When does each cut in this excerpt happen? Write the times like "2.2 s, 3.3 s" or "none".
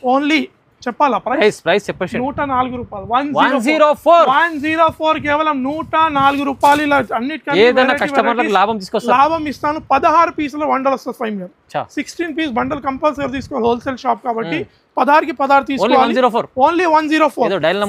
none

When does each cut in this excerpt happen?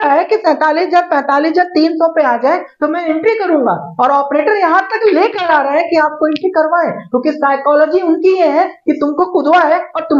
none

